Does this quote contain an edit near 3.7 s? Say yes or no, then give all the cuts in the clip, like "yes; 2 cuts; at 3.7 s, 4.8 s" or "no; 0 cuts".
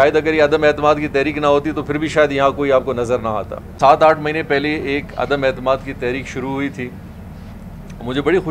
yes; 1 cut; at 3.7 s